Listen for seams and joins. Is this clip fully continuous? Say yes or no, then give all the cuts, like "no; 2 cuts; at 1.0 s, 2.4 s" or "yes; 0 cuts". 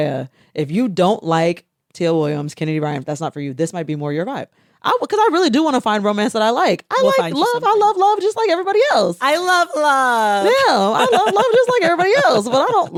yes; 0 cuts